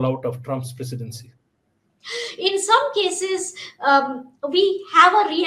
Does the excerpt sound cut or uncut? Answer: cut